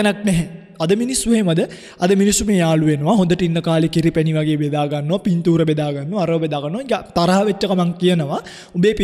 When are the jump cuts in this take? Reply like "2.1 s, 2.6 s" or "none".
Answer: none